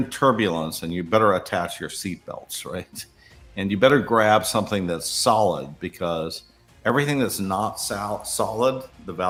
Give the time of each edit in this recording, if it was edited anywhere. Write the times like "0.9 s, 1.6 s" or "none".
none

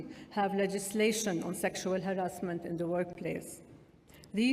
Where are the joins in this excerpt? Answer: none

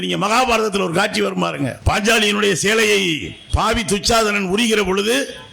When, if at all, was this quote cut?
1.8 s, 3.4 s

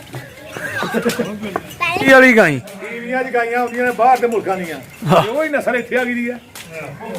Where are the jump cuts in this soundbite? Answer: 2.1 s

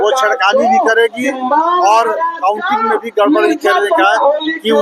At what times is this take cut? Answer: none

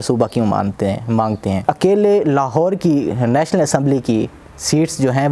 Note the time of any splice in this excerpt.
1.6 s

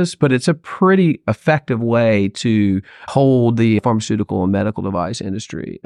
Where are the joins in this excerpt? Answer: 3.1 s, 3.8 s

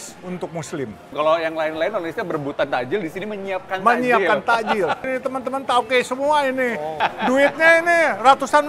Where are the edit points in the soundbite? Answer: none

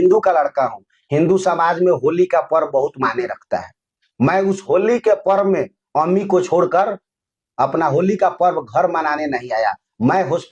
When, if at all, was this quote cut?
none

